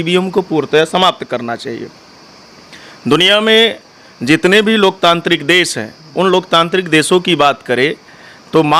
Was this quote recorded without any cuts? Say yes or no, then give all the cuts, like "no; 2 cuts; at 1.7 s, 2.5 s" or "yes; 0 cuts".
yes; 0 cuts